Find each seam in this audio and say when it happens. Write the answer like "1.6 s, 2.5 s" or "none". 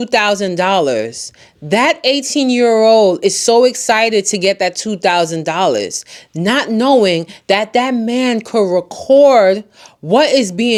none